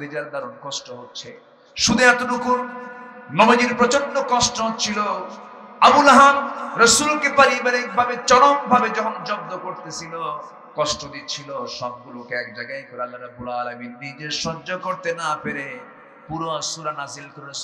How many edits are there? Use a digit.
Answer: 0